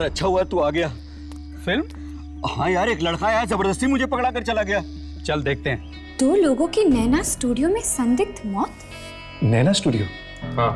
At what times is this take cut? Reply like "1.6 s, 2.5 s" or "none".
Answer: 5.9 s, 9.3 s